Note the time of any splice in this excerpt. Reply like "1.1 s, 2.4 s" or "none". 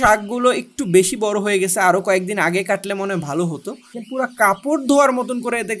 4.0 s